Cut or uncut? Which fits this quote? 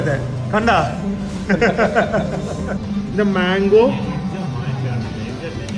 cut